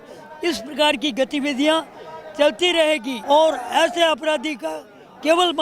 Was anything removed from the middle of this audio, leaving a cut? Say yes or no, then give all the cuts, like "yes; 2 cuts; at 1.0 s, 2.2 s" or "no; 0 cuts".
yes; 1 cut; at 3.1 s